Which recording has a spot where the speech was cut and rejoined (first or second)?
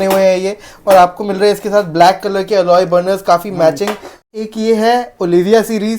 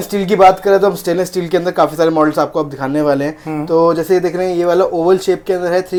first